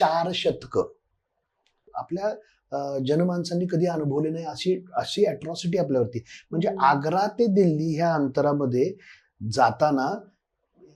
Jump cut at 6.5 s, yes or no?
no